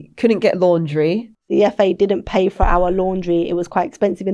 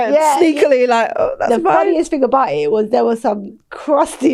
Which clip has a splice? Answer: first; 1 cut; at 1.5 s

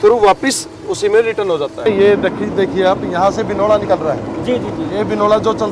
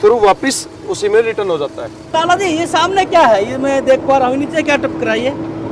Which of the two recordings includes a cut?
first; 1 cut; at 1.9 s

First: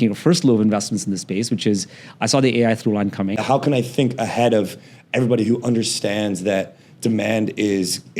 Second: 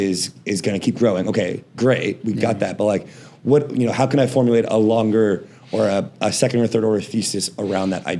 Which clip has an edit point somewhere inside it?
first; 1 cut; at 3.4 s

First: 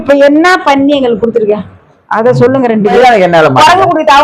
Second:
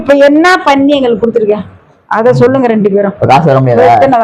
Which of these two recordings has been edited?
first; 1 cut; at 2.9 s

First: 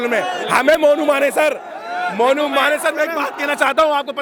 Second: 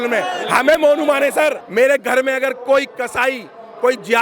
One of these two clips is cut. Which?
second; 1 cut; at 1.6 s

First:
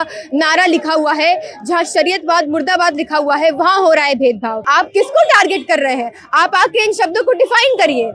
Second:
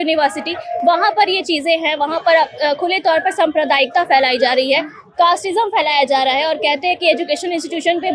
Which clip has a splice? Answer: first; 1 cut; at 4.6 s

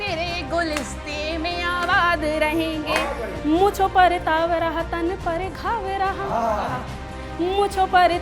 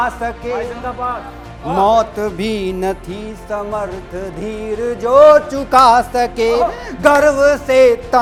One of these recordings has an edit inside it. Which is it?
first; 1 cut; at 3.3 s

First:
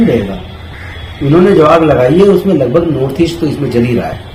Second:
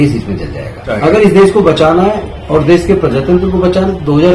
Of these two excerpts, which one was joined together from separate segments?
second; 1 cut; at 1.0 s

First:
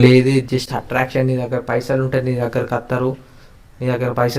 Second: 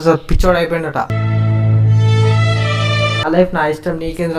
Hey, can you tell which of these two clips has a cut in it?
second; 2 cuts; at 1.1 s, 3.2 s

